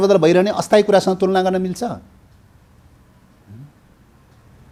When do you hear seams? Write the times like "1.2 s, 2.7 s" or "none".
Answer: none